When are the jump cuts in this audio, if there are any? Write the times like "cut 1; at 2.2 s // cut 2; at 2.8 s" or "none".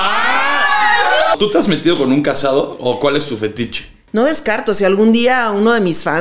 cut 1; at 1.4 s // cut 2; at 4.0 s